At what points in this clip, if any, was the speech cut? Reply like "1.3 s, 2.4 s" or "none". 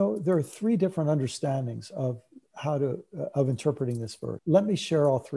4.3 s